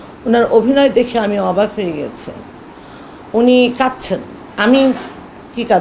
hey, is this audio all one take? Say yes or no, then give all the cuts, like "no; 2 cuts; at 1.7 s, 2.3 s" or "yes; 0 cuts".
yes; 0 cuts